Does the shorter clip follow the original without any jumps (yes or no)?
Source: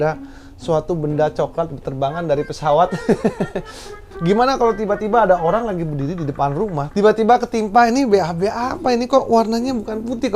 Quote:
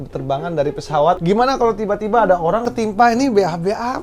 no